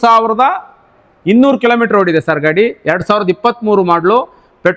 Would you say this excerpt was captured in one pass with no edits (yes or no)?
yes